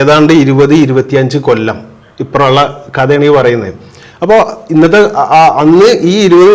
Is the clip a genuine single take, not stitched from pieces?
yes; 0 cuts

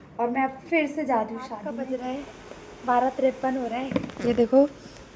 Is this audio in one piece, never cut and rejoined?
no; 1 cut; at 1.9 s

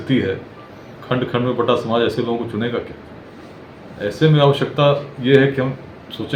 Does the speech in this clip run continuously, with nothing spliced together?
yes; 0 cuts

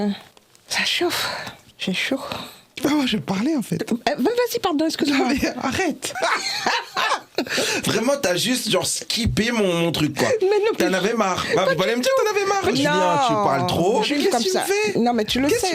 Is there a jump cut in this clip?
yes; 4 cuts; at 2.7 s, 6.0 s, 12.8 s, 14.1 s

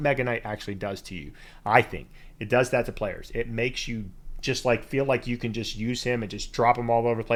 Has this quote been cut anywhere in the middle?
no; 0 cuts

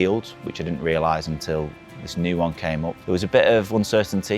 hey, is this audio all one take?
no; 1 cut; at 3.0 s

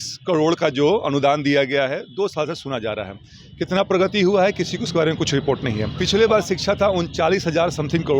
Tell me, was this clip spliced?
yes; 1 cut; at 5.9 s

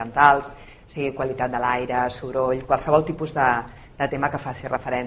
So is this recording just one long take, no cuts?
no; 1 cut; at 3.3 s

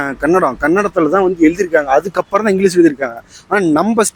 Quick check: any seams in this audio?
no; 0 cuts

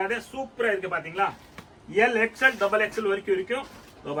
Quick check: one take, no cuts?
yes; 0 cuts

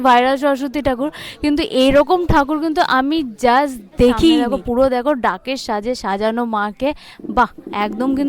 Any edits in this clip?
yes; 1 cut; at 4.5 s

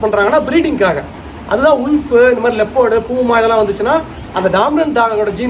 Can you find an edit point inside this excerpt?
no; 0 cuts

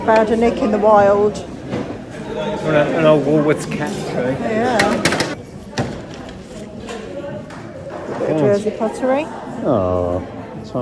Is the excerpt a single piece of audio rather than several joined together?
no; 1 cut; at 5.3 s

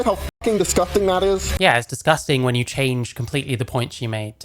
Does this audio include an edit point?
yes; 1 cut; at 1.5 s

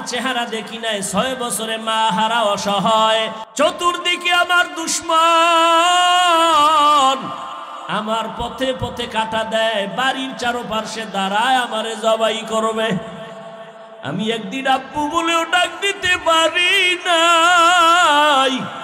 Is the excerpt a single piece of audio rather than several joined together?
no; 1 cut; at 3.4 s

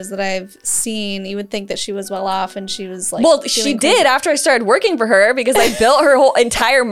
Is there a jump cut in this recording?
no; 0 cuts

